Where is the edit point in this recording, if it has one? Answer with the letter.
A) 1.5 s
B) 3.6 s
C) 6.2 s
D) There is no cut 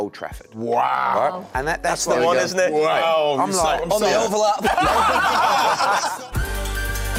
D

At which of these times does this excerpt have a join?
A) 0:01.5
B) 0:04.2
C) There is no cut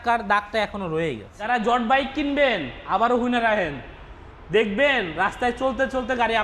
A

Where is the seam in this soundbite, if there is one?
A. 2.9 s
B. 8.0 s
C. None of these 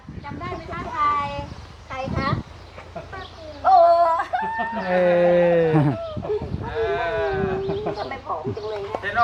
C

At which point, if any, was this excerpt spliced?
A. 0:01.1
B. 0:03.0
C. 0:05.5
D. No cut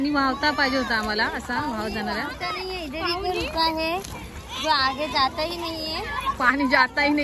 D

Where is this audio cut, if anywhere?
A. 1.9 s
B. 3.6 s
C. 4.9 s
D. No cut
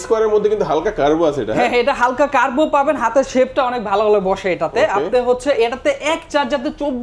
D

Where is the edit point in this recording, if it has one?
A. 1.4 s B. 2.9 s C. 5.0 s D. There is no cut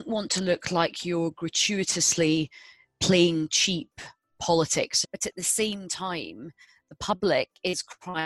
C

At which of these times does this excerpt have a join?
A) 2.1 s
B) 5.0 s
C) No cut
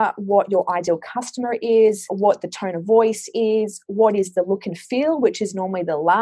A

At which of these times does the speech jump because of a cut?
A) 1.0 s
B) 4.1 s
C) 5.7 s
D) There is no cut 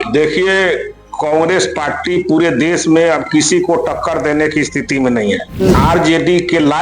C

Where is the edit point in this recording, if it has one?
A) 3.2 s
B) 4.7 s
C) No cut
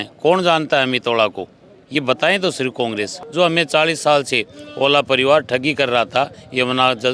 A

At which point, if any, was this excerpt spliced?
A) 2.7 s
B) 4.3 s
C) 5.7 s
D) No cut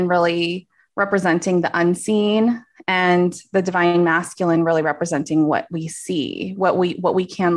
D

